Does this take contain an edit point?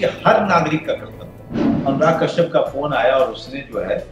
yes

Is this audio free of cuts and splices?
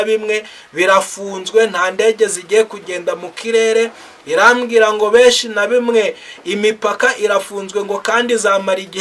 yes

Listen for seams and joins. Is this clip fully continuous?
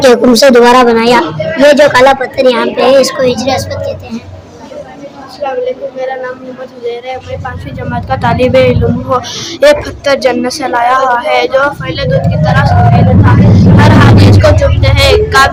yes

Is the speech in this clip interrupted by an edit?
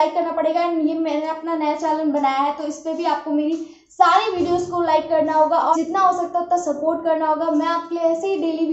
yes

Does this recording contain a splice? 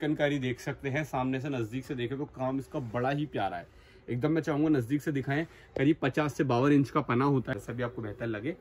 yes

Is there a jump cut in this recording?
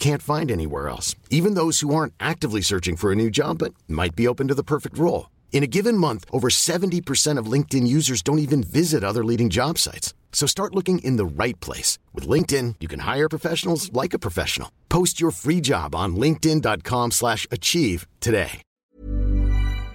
yes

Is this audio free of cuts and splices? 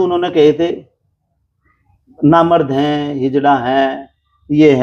yes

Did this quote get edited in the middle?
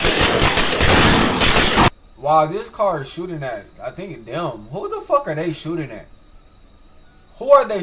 yes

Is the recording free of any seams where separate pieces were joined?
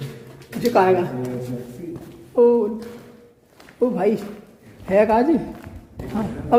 yes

